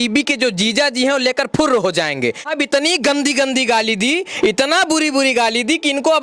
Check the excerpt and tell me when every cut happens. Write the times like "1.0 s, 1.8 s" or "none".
2.5 s